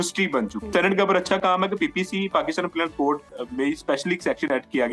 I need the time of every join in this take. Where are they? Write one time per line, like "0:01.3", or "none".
0:00.7
0:03.3

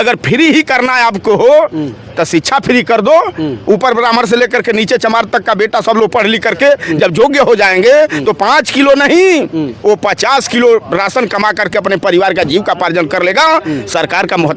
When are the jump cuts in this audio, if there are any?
none

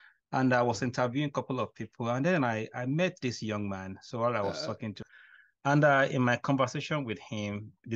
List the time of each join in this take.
0:05.1

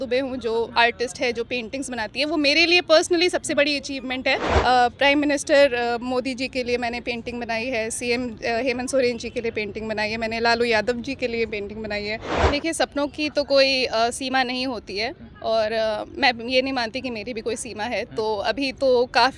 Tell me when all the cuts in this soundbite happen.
0:04.5
0:12.3

